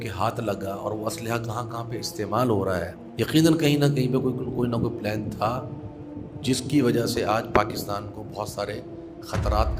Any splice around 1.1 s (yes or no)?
no